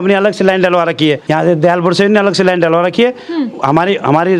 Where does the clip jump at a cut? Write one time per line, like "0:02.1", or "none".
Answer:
0:01.2